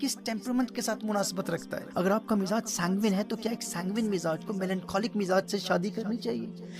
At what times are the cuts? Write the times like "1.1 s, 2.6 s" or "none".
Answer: 1.8 s